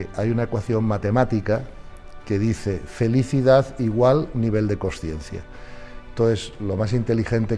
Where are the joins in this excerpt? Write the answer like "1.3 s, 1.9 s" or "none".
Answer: none

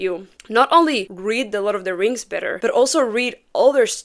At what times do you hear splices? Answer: 1.1 s, 2.5 s

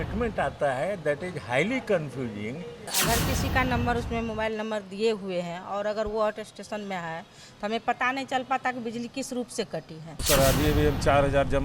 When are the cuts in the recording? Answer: 2.9 s, 10.2 s

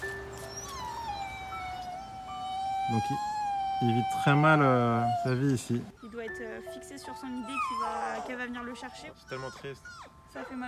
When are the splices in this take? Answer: 6.0 s, 9.0 s

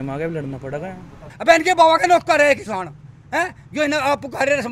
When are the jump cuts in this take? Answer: 1.3 s

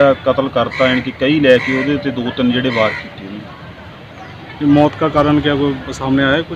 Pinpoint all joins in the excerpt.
none

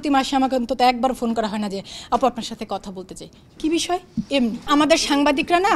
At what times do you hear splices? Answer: 4.7 s

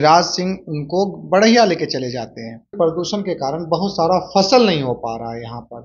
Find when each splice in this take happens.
2.7 s

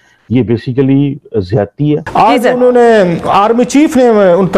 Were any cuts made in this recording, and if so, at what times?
2.1 s

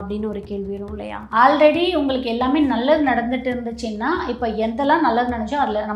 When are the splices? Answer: 1.2 s

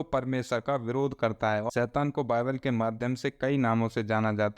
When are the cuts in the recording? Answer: 1.7 s

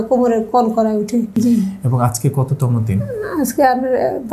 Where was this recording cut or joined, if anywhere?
1.3 s

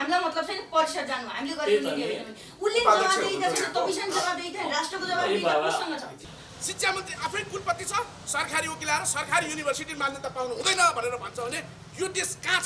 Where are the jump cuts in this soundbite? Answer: 6.1 s

